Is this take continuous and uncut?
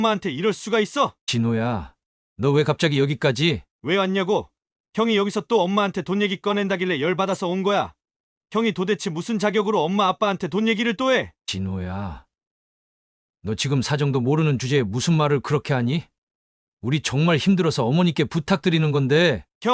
no; 1 cut; at 11.4 s

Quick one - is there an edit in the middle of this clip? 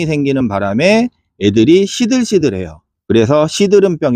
no; 0 cuts

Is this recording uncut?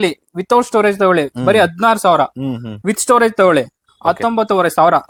yes; 0 cuts

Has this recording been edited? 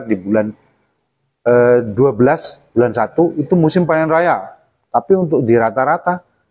no; 0 cuts

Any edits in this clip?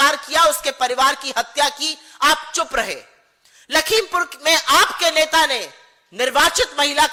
no; 0 cuts

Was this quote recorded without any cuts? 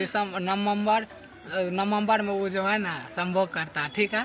yes; 0 cuts

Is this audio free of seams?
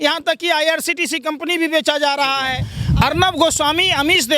no; 1 cut; at 2.7 s

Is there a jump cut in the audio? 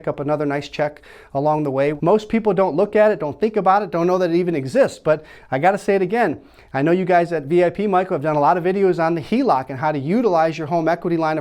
yes; 1 cut; at 2.0 s

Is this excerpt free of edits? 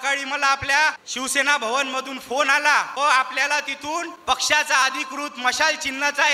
no; 3 cuts; at 1.1 s, 2.9 s, 4.1 s

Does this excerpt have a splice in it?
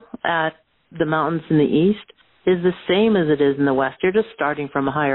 no; 0 cuts

